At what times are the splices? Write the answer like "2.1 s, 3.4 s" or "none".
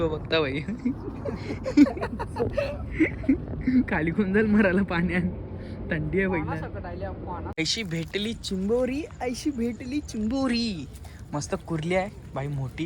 7.5 s